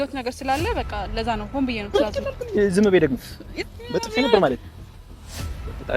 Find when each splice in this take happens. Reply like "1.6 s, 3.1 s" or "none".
1.9 s